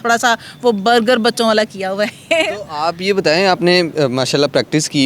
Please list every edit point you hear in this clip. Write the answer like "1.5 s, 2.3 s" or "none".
none